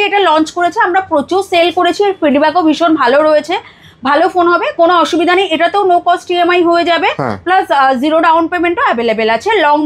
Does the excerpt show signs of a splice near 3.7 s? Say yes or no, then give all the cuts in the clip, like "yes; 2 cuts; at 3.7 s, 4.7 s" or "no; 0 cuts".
no; 0 cuts